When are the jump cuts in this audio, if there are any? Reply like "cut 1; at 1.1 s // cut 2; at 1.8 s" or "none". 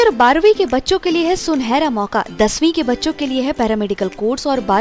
none

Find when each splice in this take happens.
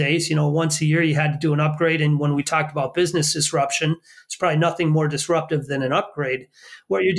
none

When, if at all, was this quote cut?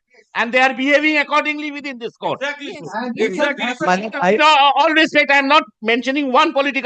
none

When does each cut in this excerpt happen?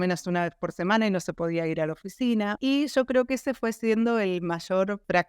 cut 1; at 2.6 s

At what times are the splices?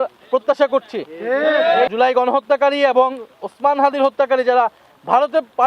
cut 1; at 1.9 s

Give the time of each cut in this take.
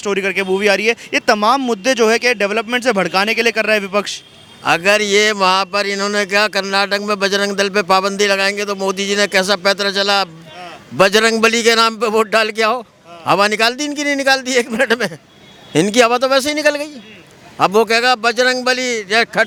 none

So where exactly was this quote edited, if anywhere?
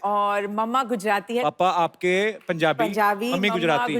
cut 1; at 1.4 s

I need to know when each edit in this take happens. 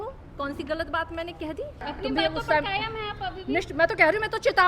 cut 1; at 1.8 s

